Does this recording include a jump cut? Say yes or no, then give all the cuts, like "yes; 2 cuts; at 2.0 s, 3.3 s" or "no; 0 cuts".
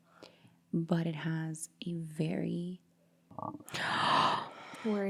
yes; 1 cut; at 3.2 s